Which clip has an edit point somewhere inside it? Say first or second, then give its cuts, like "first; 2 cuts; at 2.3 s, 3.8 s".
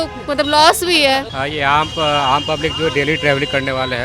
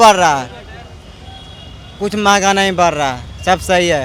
first; 1 cut; at 1.3 s